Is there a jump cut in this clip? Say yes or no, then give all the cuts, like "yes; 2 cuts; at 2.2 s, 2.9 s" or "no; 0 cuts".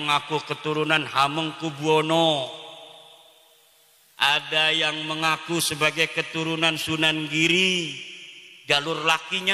no; 0 cuts